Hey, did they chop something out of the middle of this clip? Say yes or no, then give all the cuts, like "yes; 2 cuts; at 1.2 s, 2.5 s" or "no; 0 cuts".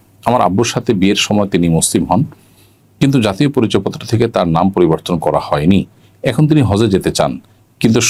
no; 0 cuts